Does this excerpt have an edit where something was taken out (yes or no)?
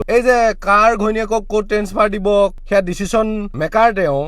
yes